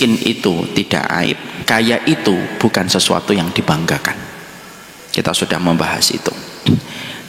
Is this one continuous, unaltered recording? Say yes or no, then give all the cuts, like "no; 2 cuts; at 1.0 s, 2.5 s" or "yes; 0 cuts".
no; 1 cut; at 1.5 s